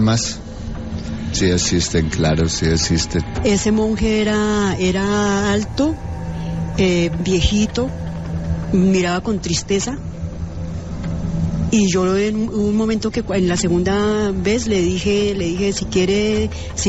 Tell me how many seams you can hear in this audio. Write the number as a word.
zero